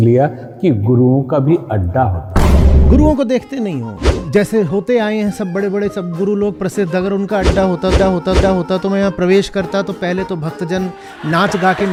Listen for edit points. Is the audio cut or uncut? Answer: uncut